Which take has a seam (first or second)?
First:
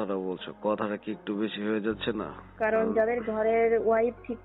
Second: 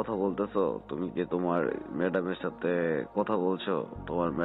first